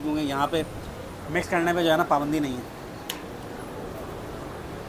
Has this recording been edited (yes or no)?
no